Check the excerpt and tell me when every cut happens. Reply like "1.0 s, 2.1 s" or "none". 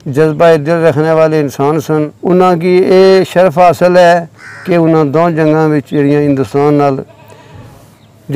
2.1 s